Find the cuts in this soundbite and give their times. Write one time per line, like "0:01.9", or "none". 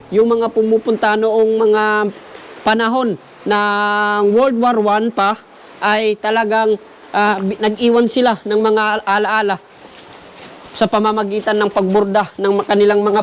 none